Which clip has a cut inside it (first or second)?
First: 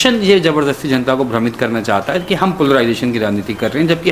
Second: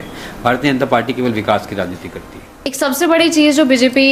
second